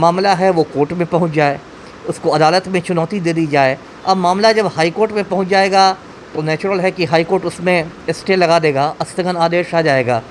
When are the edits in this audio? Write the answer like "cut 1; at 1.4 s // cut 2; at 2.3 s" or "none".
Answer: none